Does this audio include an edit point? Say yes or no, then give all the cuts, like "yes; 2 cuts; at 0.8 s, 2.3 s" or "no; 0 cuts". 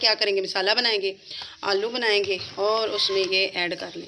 no; 0 cuts